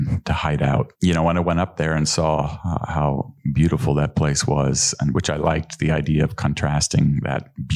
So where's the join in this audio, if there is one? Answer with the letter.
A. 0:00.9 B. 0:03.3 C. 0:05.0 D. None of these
A